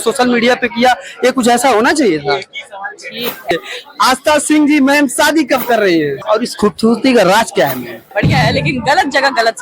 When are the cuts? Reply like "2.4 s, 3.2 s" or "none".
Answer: 3.5 s, 6.2 s, 8.1 s